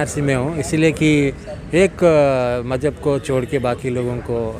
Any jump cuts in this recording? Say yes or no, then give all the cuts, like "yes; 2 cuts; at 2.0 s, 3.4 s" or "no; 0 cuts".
no; 0 cuts